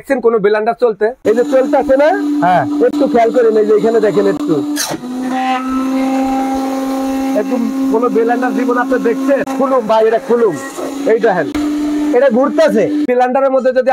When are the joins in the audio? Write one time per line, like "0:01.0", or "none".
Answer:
0:01.2
0:09.5
0:11.5
0:13.0